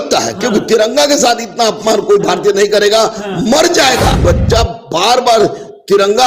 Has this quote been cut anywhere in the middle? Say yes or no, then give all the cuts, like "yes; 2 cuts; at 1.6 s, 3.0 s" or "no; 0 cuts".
yes; 1 cut; at 4.2 s